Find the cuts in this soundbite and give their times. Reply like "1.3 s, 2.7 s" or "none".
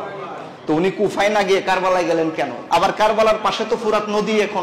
2.6 s